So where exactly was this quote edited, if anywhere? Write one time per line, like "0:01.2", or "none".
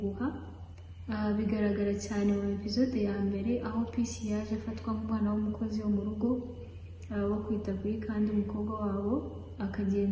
none